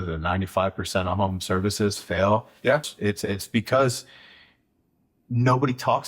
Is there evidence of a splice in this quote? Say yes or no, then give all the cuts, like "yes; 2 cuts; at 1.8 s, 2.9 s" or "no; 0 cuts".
yes; 1 cut; at 2.9 s